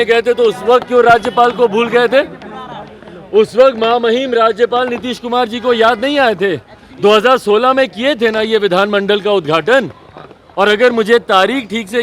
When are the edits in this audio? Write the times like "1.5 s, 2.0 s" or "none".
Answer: none